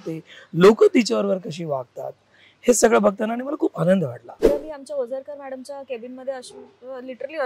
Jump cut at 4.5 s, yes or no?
yes